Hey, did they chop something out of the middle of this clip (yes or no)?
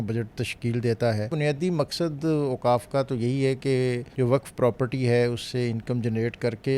yes